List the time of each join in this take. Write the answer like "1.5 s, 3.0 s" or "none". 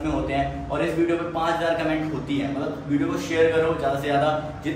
none